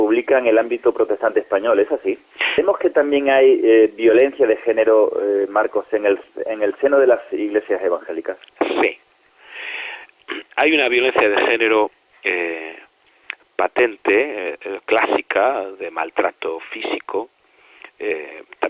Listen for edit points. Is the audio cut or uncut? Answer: uncut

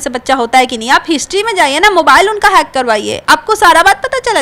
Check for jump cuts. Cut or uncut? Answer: uncut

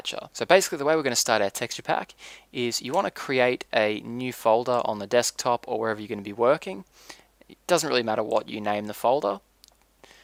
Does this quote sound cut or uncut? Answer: uncut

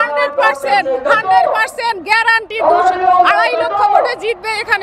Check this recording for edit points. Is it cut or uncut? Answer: uncut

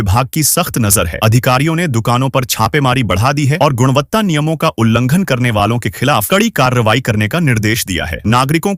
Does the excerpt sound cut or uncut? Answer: uncut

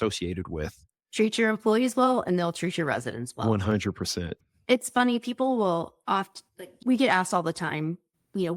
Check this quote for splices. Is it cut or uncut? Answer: cut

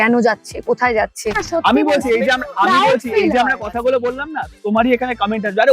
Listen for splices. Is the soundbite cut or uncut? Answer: cut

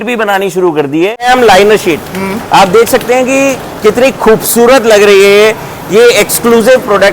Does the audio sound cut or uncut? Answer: cut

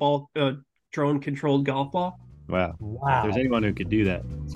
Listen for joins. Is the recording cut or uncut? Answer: uncut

